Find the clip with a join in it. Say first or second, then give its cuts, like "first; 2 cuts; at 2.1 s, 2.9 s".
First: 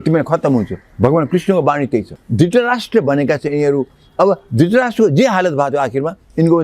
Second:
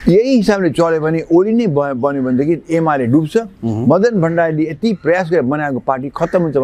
first; 1 cut; at 2.2 s